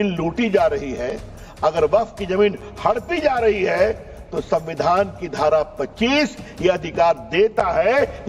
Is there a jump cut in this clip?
no; 0 cuts

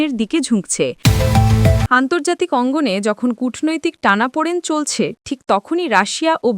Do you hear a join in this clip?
yes; 1 cut; at 1.0 s

